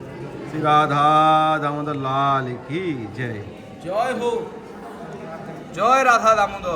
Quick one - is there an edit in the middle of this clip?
no; 0 cuts

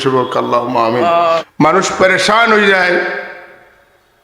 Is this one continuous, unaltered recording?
no; 1 cut; at 1.5 s

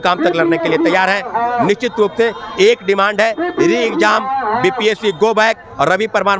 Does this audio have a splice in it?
no; 0 cuts

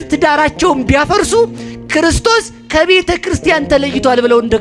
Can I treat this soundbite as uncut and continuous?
yes; 0 cuts

